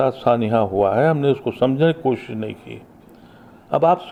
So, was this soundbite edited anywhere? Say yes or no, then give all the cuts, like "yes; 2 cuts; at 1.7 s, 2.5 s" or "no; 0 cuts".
no; 0 cuts